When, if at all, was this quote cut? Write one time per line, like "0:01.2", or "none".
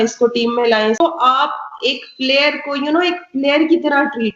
0:01.0